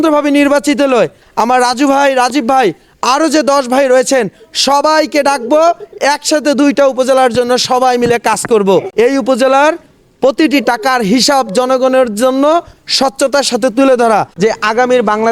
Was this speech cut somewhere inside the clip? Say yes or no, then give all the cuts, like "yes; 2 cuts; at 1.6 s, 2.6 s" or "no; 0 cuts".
yes; 2 cuts; at 8.9 s, 14.3 s